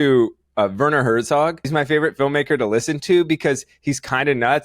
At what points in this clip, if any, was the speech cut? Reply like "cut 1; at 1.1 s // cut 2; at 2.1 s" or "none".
cut 1; at 1.7 s